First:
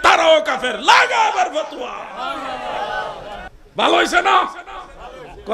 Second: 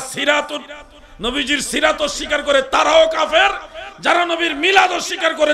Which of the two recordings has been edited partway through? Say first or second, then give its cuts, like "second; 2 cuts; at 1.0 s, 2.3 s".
first; 1 cut; at 3.5 s